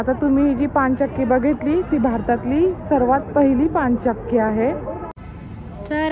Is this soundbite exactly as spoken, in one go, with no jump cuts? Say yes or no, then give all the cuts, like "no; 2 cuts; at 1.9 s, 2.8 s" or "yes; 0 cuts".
no; 1 cut; at 5.2 s